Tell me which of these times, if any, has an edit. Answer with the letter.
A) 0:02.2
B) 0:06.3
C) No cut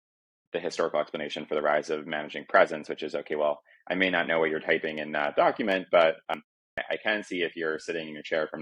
B